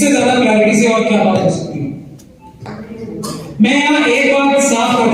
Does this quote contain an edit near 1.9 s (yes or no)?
no